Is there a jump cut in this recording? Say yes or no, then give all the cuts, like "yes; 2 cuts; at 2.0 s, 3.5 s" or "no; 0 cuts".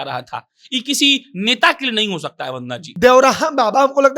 yes; 1 cut; at 2.8 s